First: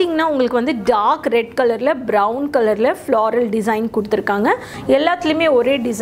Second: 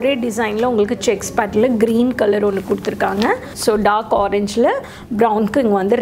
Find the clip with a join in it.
first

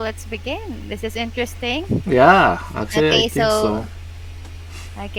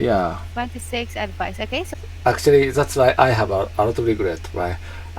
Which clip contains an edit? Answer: second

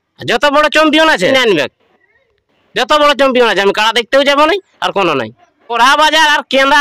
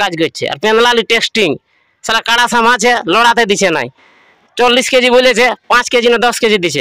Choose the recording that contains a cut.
first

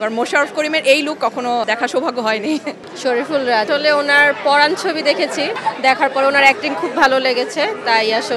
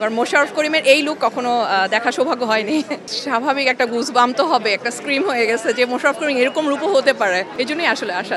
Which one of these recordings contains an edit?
first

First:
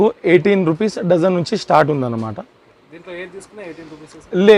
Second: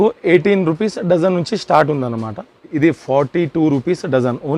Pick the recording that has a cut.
second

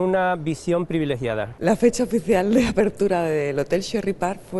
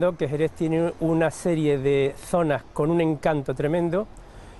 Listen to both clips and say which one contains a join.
first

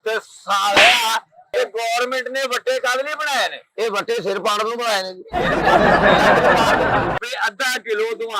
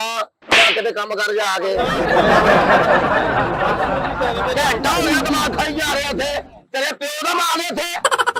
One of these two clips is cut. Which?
first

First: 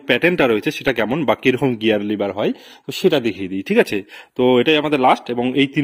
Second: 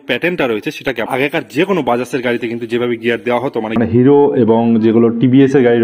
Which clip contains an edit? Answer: second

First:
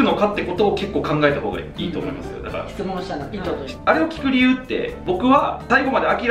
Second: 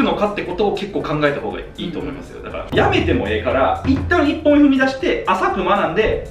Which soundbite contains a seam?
second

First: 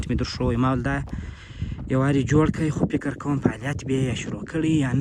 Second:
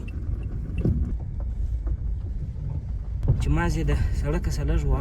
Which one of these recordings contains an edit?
second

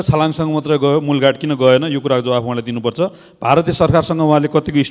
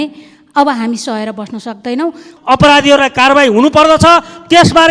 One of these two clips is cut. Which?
second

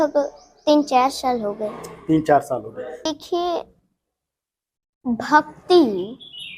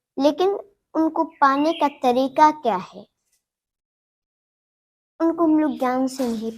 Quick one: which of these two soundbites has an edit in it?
first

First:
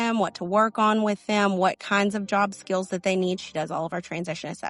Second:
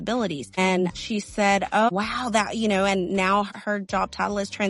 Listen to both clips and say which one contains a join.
second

